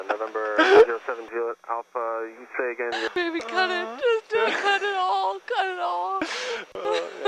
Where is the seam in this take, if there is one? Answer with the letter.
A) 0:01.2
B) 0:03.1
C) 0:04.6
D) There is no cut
B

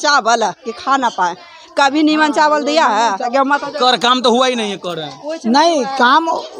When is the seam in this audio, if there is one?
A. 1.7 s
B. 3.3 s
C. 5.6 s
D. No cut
B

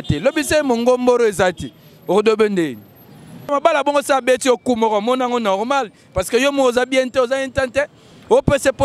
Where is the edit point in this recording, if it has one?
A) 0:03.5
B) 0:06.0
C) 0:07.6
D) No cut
A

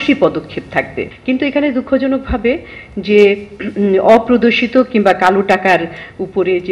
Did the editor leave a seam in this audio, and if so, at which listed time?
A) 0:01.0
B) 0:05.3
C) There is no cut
A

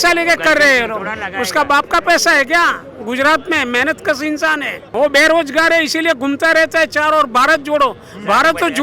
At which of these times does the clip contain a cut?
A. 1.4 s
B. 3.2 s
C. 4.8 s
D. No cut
C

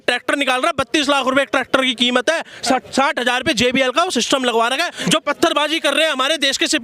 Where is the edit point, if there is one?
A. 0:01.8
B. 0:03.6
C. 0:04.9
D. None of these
C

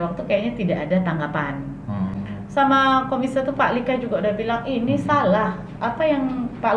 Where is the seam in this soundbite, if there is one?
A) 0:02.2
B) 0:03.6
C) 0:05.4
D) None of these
A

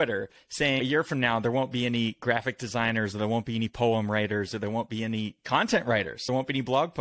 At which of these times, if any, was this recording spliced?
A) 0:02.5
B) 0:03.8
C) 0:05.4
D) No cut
D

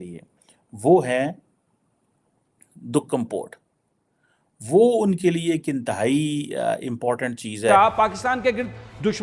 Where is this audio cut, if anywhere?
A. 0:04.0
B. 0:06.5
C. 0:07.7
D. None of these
C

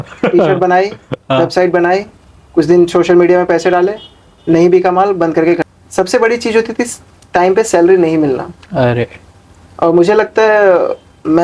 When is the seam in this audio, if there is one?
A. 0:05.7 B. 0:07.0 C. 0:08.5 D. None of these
A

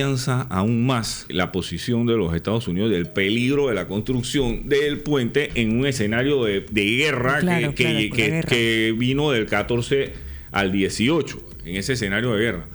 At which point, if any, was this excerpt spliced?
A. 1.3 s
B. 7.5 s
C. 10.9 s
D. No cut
A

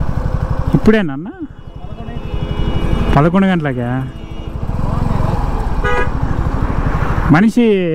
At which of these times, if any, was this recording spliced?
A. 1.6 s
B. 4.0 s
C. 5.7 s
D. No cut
D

